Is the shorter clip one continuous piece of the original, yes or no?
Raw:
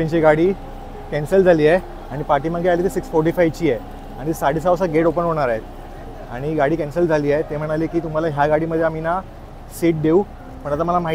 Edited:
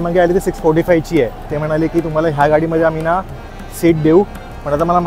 no